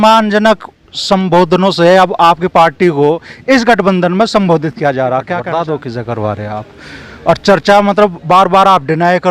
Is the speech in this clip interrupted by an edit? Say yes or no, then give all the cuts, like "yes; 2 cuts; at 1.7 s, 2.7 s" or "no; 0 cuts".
yes; 1 cut; at 5.4 s